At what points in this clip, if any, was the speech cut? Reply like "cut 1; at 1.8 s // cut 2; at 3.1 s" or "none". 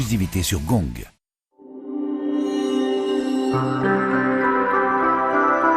cut 1; at 1.0 s